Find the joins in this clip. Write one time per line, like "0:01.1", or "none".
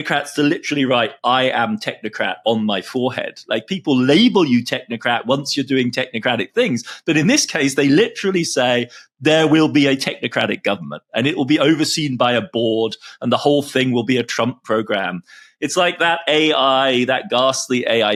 none